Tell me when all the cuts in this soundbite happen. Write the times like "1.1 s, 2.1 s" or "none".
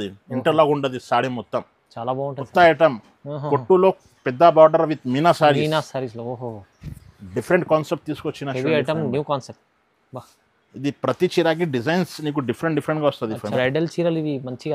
2.4 s, 13.5 s

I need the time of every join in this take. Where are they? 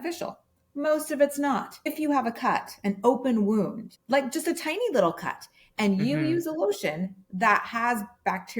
1.9 s

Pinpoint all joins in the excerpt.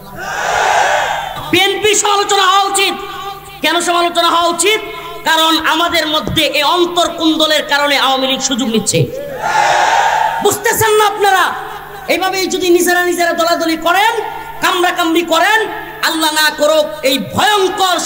1.3 s

